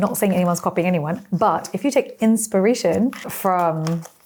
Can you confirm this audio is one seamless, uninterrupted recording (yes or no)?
yes